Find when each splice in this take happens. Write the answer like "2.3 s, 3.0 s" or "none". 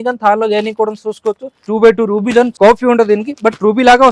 1.5 s, 2.5 s

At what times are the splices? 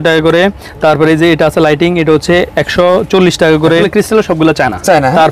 3.9 s

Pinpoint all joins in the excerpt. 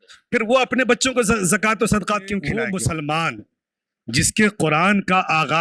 2.6 s

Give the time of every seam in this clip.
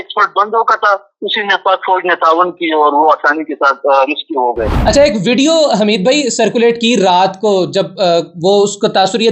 4.7 s

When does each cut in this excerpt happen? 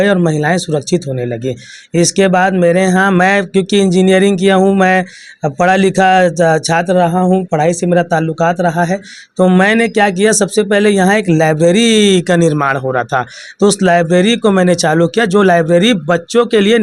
none

